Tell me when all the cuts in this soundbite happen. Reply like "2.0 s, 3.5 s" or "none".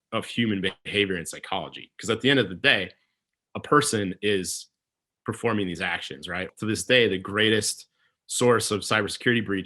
6.5 s